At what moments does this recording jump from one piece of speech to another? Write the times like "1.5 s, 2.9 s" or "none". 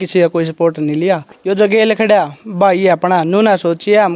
1.3 s